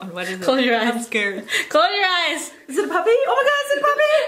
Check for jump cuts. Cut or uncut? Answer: cut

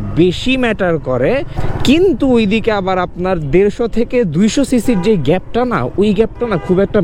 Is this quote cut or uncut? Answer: uncut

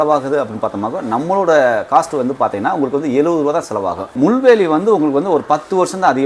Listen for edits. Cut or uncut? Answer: cut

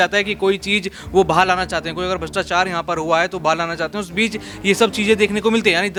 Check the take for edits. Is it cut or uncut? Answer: uncut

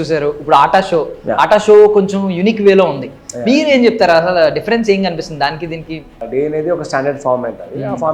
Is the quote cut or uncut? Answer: cut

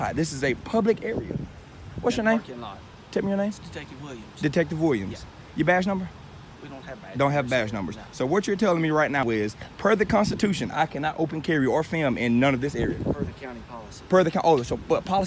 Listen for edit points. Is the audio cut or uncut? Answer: uncut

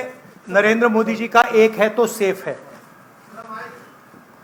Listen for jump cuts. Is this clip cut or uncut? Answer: uncut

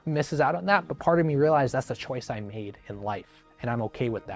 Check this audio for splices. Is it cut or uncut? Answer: uncut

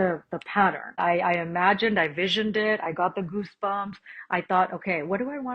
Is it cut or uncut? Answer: cut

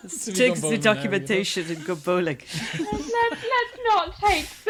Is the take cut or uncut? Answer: uncut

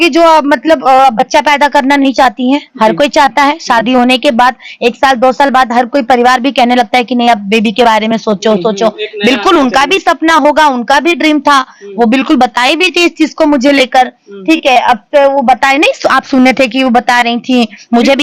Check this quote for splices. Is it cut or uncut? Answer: uncut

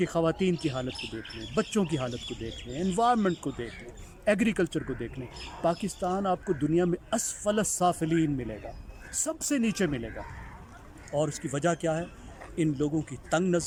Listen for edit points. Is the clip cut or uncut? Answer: uncut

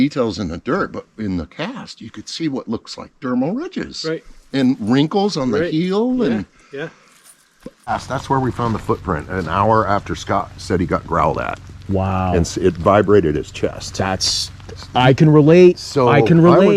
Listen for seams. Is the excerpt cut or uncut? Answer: cut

